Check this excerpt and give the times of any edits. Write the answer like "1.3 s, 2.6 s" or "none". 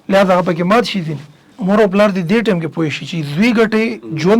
1.5 s